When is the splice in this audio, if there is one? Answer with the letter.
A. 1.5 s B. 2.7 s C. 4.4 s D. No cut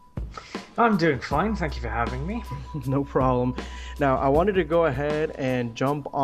A